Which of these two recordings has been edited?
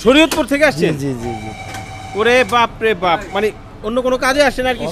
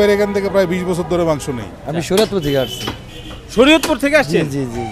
second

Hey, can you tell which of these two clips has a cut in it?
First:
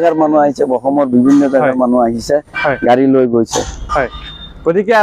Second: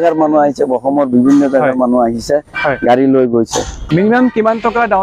second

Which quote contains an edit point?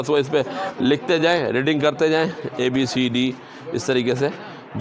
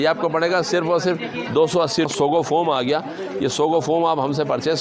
second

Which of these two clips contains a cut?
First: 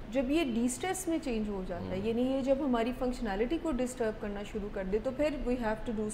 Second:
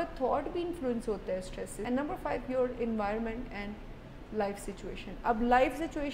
second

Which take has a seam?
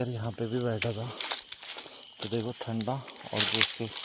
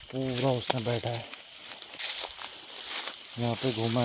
second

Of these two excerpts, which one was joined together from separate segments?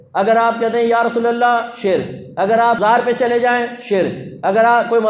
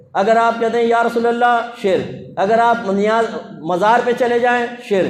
first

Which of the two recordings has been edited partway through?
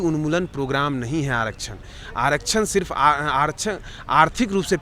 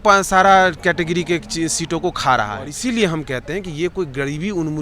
second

